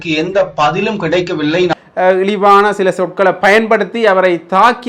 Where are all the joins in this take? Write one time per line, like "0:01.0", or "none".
0:01.7

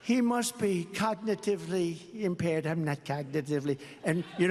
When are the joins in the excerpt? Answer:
none

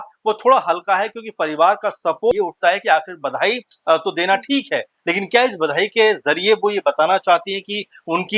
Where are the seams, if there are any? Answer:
0:02.3

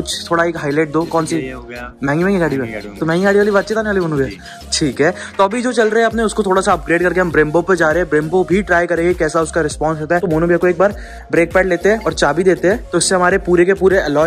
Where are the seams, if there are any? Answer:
none

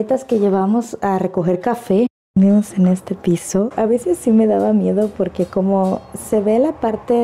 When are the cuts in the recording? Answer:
0:02.2
0:03.7

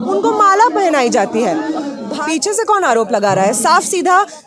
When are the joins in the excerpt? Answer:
0:02.1

